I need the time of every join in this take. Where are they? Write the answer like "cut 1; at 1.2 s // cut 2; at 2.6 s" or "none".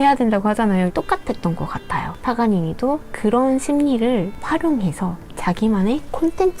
cut 1; at 0.9 s